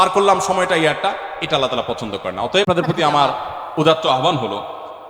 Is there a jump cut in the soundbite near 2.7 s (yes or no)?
yes